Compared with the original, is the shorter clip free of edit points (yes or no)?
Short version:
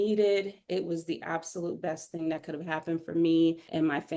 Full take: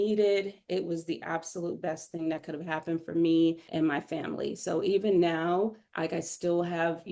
yes